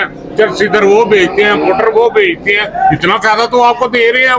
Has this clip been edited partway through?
no; 0 cuts

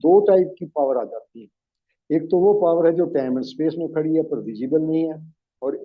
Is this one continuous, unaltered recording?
yes; 0 cuts

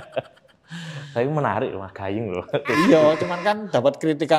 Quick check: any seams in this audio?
no; 0 cuts

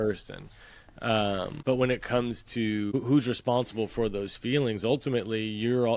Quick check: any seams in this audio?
yes; 2 cuts; at 1.6 s, 2.9 s

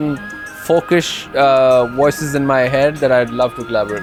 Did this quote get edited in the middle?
no; 0 cuts

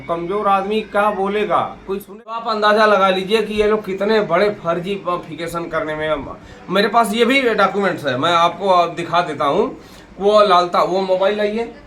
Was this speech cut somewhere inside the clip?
yes; 1 cut; at 2.3 s

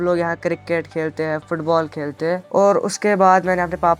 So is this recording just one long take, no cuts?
no; 1 cut; at 2.4 s

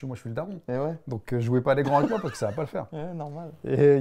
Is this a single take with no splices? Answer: yes; 0 cuts

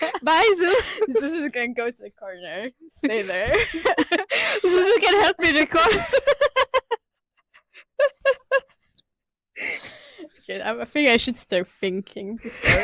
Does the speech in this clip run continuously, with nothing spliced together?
yes; 0 cuts

